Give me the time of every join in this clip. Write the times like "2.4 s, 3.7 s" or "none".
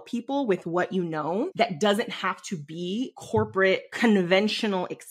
1.5 s, 3.2 s, 3.9 s